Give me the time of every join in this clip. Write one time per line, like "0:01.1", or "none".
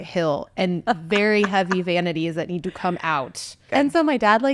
0:03.6